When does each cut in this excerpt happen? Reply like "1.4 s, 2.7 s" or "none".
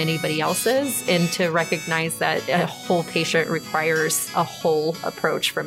2.4 s, 4.2 s